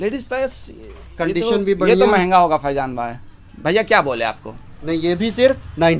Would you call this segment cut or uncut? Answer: uncut